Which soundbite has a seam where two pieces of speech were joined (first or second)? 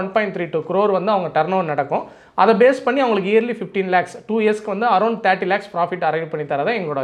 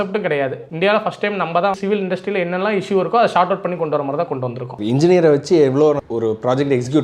second